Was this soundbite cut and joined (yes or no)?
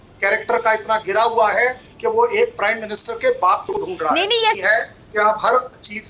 yes